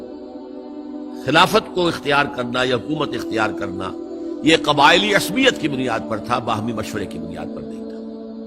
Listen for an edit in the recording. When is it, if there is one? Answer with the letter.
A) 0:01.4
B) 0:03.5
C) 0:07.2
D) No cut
C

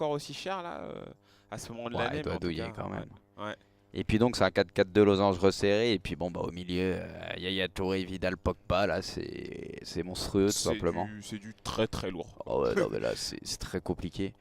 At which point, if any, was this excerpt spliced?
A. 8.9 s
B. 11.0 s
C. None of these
A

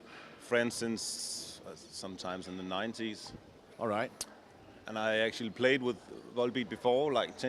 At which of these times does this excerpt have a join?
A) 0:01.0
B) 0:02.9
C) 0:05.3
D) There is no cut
B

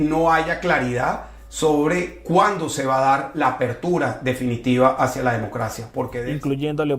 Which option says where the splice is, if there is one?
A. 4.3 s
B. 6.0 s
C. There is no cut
B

